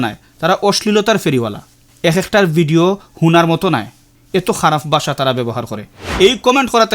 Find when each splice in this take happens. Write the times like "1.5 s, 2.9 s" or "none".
6.0 s